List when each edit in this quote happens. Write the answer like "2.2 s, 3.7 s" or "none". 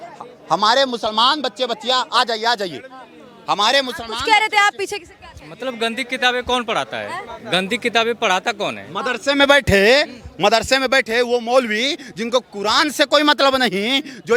none